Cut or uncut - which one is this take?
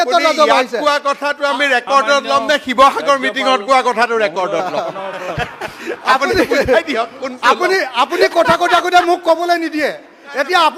uncut